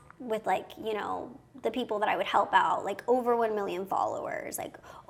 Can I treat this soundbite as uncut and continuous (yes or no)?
yes